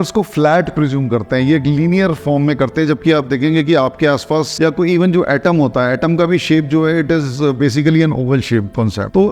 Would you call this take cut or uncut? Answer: uncut